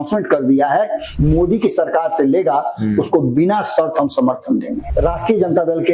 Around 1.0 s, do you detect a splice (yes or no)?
yes